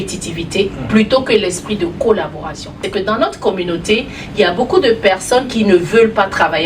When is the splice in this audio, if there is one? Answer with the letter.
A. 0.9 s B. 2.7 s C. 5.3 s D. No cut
B